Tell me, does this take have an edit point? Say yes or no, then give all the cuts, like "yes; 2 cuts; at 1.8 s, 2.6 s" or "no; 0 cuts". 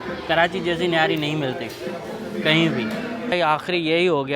yes; 1 cut; at 3.3 s